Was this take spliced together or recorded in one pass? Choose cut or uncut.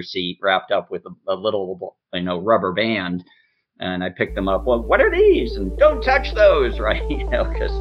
uncut